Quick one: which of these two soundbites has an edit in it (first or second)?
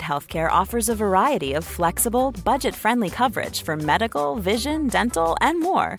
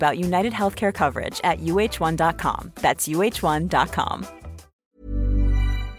second